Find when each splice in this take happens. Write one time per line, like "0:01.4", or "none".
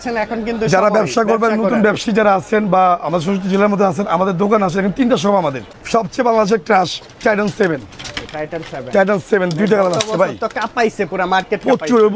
0:05.7